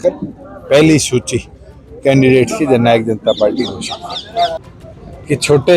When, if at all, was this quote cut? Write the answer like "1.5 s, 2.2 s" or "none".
4.5 s